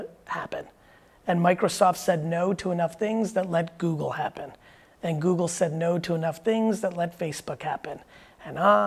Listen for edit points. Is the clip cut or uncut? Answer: uncut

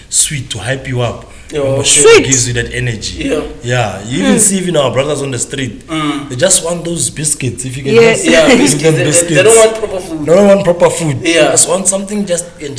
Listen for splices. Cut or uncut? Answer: uncut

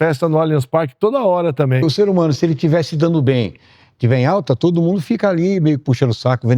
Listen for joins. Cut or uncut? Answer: cut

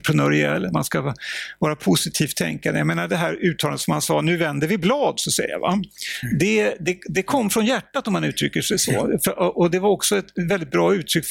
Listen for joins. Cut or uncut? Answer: uncut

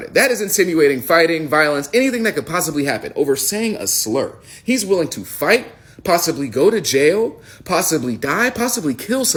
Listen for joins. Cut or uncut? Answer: uncut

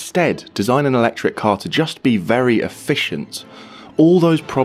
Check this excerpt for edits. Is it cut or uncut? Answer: uncut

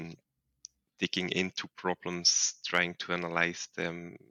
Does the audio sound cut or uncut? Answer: uncut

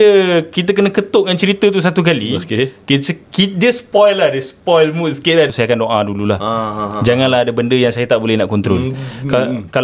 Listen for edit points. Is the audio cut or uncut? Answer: cut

